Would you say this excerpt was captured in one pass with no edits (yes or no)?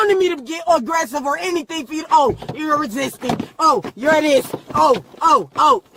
yes